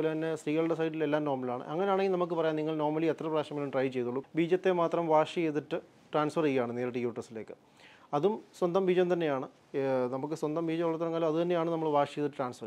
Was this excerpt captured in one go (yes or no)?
no